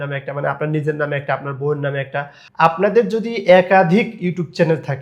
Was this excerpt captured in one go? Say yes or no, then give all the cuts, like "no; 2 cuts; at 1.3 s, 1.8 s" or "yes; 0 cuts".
no; 1 cut; at 2.4 s